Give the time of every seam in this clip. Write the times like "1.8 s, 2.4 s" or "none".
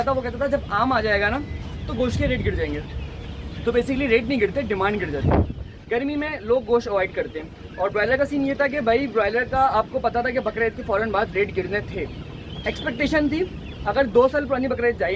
none